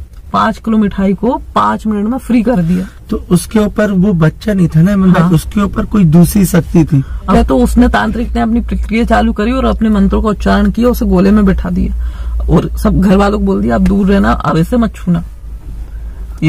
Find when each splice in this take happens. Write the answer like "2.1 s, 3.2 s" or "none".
7.3 s